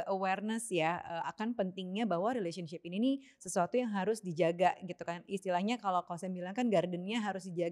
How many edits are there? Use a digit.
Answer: 0